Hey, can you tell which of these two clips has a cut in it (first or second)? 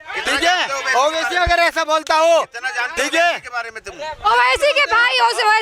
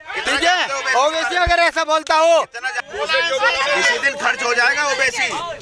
second